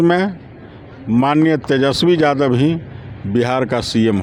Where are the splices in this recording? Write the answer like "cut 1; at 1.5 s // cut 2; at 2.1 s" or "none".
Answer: none